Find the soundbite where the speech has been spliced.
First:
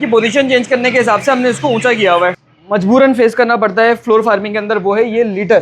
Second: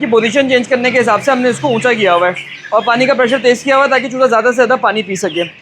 first; 1 cut; at 2.5 s

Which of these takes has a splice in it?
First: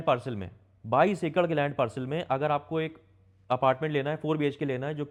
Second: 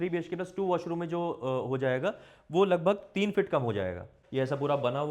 second; 1 cut; at 4.2 s

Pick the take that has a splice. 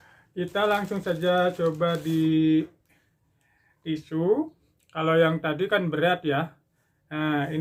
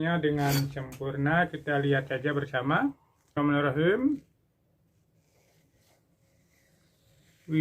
second; 1 cut; at 3.4 s

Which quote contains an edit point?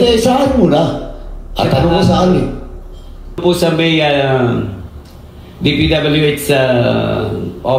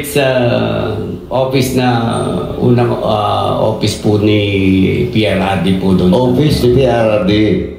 first; 1 cut; at 3.4 s

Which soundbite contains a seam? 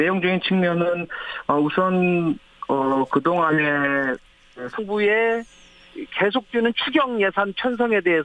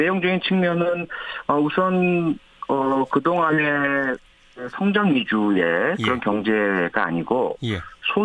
second; 1 cut; at 4.8 s

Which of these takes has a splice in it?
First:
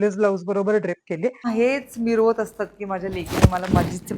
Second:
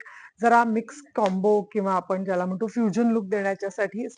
first; 1 cut; at 1.5 s

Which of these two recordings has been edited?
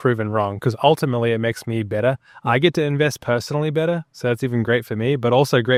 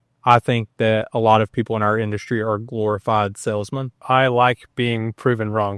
second; 1 cut; at 4.0 s

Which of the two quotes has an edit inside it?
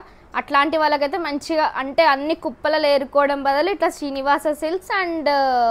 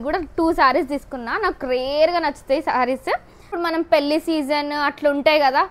second; 1 cut; at 3.5 s

